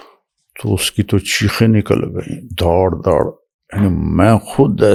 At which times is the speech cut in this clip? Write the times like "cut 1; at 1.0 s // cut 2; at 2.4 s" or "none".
none

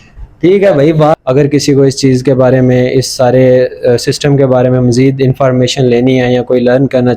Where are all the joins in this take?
cut 1; at 1.1 s

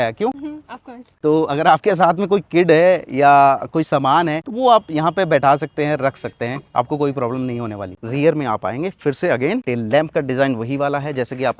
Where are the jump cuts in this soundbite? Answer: none

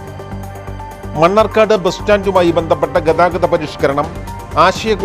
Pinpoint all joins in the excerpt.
cut 1; at 0.9 s

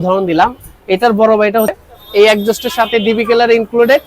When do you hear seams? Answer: cut 1; at 1.7 s

